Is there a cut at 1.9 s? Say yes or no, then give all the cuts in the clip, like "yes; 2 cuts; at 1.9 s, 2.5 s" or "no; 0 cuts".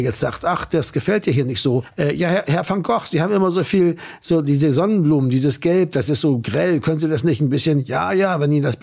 yes; 1 cut; at 1.9 s